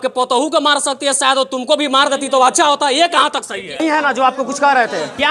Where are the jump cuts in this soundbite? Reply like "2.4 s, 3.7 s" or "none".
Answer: 3.8 s